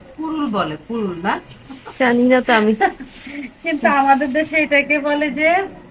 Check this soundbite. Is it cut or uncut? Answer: uncut